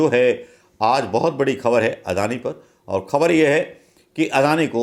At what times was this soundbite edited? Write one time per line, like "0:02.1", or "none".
none